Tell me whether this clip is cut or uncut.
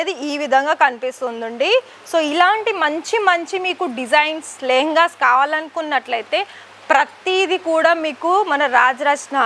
uncut